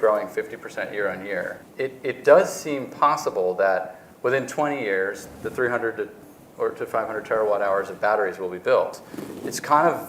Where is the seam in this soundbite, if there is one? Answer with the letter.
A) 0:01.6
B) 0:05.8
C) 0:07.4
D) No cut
A